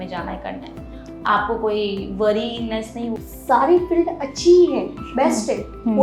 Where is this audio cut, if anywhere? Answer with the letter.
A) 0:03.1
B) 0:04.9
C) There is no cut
A